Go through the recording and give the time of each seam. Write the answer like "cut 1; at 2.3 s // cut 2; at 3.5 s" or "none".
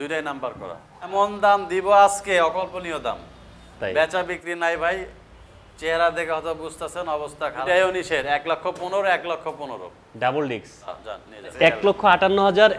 cut 1; at 1.1 s // cut 2; at 7.6 s // cut 3; at 11.5 s